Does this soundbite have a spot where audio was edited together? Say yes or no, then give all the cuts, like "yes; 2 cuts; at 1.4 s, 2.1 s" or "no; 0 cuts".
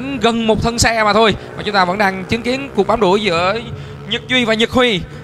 no; 0 cuts